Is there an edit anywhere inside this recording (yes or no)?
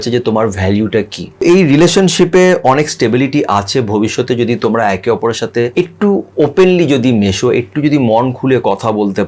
yes